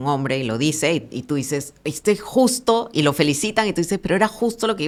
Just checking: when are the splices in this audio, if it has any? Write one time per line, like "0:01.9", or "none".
none